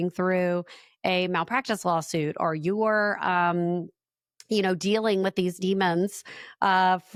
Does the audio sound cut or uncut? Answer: uncut